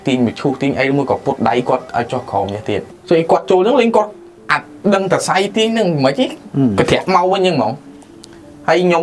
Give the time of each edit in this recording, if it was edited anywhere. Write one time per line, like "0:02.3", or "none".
0:02.9